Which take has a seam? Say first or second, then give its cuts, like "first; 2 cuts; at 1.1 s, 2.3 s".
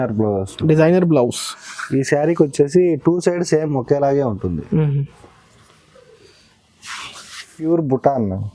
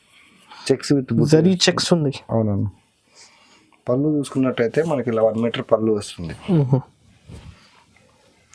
first; 1 cut; at 7.7 s